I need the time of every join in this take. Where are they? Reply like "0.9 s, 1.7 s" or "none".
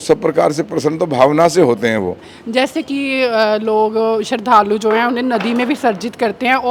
2.3 s